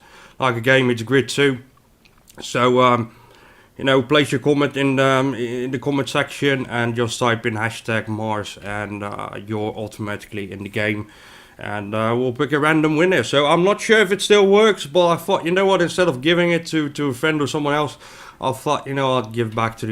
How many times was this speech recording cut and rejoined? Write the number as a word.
one